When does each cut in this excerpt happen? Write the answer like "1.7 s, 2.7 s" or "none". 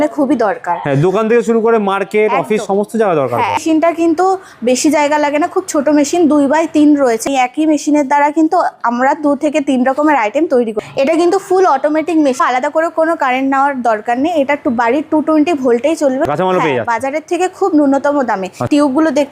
3.6 s, 7.2 s, 10.8 s, 12.4 s, 16.3 s